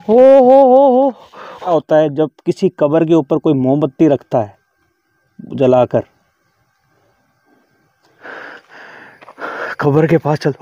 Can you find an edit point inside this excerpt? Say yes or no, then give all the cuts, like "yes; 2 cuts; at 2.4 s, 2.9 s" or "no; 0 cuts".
yes; 2 cuts; at 1.7 s, 8.2 s